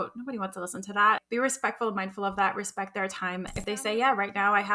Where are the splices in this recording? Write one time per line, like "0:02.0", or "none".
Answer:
0:01.2
0:03.5